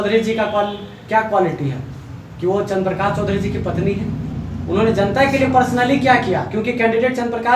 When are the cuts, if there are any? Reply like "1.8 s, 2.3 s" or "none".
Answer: none